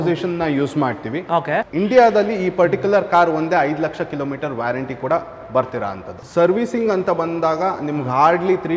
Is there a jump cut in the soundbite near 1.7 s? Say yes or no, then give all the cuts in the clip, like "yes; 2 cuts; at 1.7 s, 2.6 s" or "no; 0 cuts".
yes; 2 cuts; at 1.7 s, 6.1 s